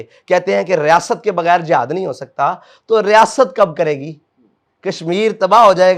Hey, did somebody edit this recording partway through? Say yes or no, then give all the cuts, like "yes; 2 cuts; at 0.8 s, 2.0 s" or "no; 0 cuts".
no; 0 cuts